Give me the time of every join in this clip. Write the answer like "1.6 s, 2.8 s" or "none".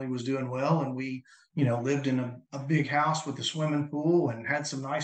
none